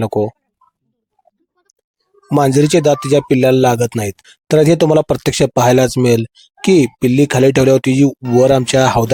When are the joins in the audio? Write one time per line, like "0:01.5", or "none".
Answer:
none